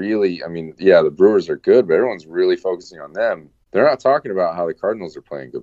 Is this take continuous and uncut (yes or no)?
no